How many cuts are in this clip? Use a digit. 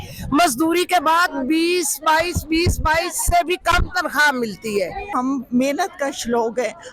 1